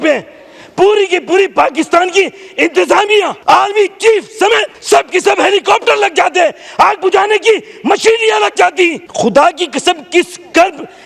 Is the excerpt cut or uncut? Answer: cut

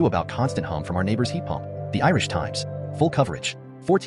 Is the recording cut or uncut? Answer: uncut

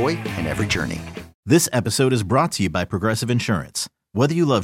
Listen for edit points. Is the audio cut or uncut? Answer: cut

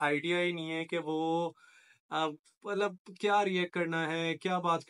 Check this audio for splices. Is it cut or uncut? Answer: uncut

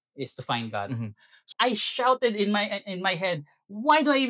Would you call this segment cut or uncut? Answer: cut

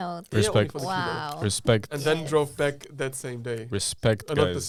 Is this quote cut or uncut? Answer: uncut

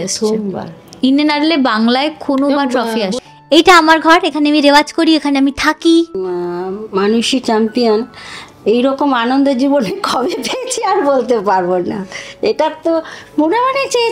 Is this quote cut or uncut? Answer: cut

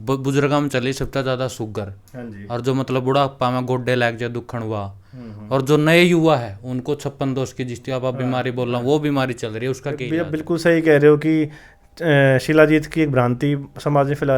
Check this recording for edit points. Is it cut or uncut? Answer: cut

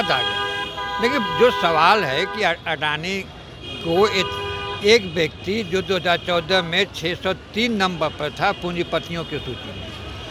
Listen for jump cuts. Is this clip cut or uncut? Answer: uncut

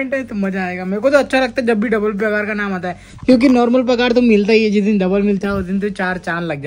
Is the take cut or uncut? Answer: uncut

